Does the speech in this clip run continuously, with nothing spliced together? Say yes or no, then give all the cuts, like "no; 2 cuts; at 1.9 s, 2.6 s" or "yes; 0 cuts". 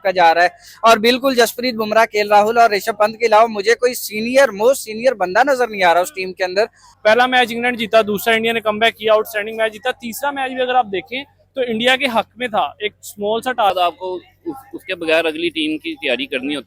no; 2 cuts; at 6.8 s, 13.7 s